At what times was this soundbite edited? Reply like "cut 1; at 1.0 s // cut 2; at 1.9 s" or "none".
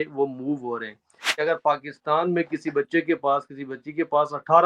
cut 1; at 1.3 s